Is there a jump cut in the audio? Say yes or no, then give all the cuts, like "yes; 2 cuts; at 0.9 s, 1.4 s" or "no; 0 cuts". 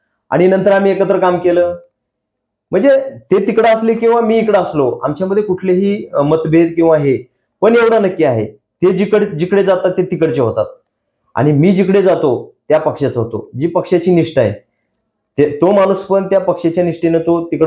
no; 0 cuts